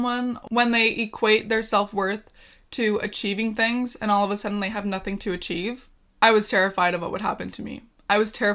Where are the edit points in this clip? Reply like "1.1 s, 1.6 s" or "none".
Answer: none